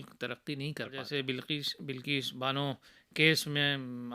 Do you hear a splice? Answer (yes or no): yes